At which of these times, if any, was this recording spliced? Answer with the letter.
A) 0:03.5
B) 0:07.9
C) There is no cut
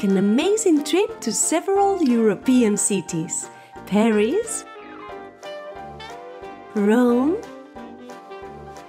B